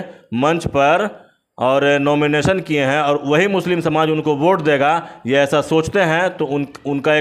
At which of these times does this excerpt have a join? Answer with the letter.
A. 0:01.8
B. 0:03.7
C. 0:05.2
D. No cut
D